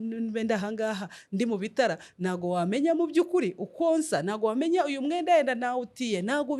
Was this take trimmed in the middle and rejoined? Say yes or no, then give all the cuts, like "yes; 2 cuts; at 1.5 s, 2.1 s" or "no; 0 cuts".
no; 0 cuts